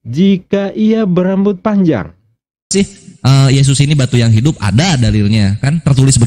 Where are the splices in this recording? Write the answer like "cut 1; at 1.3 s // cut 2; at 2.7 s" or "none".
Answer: cut 1; at 2.7 s